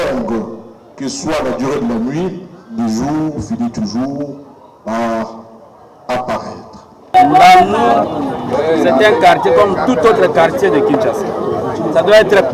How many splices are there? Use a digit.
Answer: 1